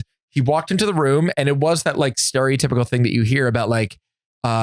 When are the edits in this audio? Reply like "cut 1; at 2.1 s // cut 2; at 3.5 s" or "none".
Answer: none